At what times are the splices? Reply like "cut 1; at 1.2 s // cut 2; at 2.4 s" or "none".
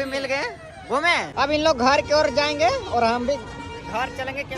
cut 1; at 1.3 s